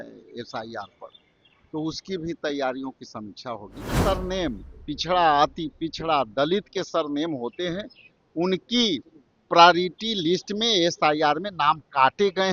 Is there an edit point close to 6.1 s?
no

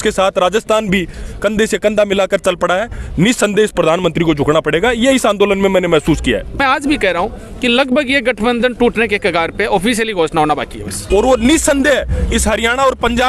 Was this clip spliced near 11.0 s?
yes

